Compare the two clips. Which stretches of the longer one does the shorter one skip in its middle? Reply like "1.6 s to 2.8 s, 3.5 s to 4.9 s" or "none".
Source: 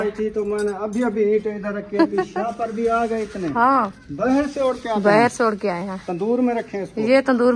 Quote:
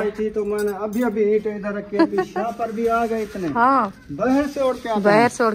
none